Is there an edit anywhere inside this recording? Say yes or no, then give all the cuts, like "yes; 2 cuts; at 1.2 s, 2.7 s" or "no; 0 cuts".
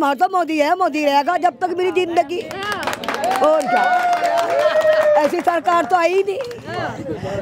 no; 0 cuts